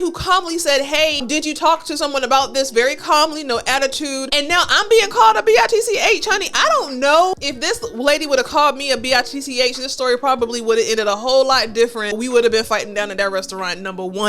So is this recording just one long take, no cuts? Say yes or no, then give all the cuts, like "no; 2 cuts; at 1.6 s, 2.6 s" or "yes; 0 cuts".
no; 4 cuts; at 1.2 s, 4.2 s, 7.3 s, 12.2 s